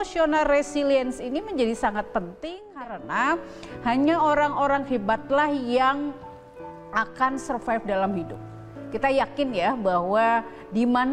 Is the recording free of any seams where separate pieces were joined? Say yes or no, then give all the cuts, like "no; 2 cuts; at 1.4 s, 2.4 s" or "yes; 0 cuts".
no; 1 cut; at 2.7 s